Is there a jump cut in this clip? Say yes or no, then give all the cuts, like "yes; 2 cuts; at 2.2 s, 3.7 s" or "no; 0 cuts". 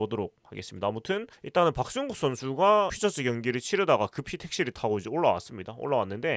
yes; 1 cut; at 1.4 s